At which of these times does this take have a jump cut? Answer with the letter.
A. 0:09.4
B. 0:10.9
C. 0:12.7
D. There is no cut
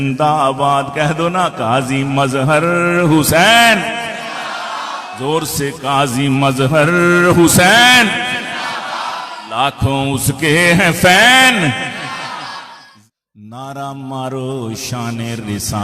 C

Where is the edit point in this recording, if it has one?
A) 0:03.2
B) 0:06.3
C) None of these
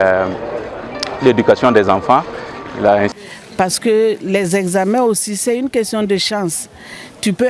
A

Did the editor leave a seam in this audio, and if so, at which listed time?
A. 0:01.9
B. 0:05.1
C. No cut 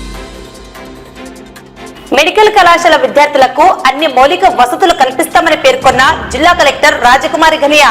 A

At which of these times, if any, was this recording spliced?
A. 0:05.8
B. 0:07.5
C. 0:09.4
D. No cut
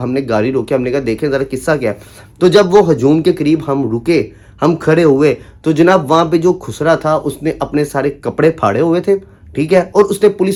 D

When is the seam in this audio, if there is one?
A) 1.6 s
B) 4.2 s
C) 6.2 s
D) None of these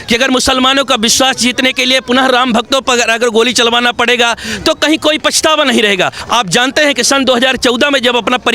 C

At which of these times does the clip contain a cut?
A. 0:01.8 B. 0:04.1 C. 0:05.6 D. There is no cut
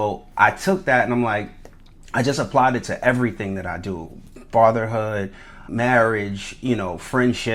C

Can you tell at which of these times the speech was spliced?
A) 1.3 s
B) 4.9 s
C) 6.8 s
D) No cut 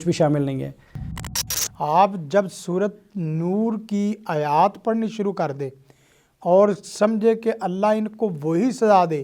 A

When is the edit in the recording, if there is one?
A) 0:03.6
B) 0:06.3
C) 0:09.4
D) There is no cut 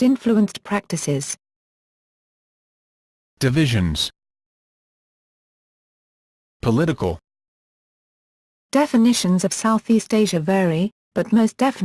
C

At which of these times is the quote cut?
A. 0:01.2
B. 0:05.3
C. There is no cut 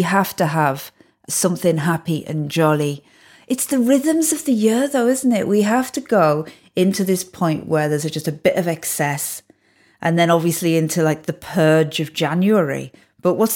A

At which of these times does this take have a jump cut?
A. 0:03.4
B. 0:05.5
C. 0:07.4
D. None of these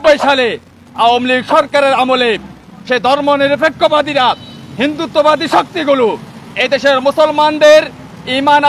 D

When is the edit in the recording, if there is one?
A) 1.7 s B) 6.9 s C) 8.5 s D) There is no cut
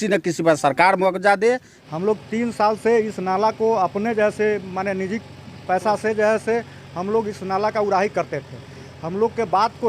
A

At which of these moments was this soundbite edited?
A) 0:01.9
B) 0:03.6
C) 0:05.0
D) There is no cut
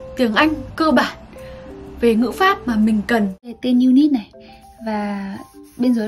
B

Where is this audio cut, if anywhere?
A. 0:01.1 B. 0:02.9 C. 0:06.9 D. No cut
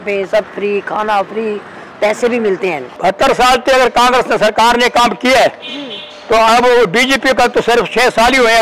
B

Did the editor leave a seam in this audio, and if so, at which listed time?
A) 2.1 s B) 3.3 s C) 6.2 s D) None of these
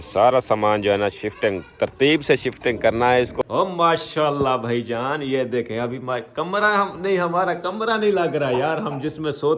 B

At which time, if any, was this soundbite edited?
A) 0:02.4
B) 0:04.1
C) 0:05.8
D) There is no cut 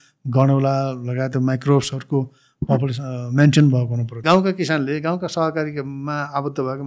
B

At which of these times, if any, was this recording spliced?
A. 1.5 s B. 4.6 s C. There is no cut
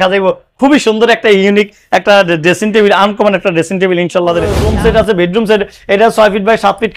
B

